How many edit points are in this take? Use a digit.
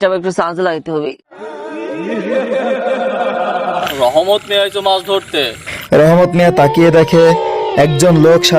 2